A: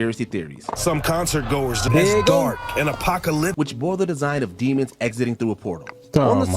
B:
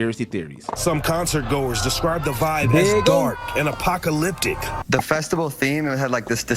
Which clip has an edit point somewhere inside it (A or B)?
A